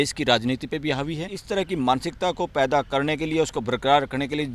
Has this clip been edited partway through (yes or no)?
yes